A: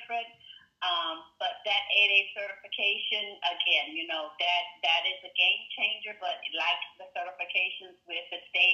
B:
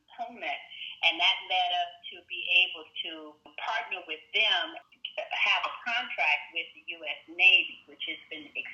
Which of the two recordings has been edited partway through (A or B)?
B